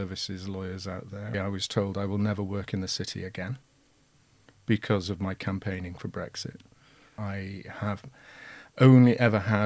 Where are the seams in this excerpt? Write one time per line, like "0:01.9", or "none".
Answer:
0:01.3
0:07.2